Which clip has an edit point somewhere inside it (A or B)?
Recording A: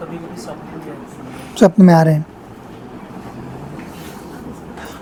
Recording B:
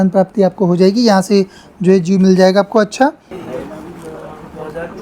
B